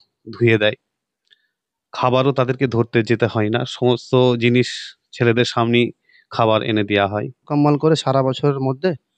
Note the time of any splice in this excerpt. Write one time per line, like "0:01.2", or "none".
0:07.5